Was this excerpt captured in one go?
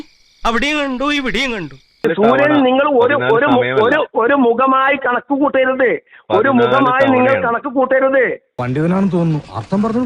no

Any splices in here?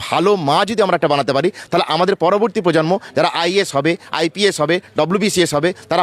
no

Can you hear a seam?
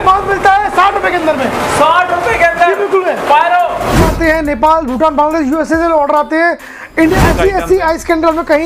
yes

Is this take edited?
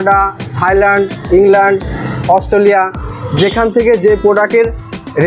no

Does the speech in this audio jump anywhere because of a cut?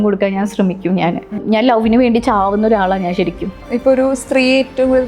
yes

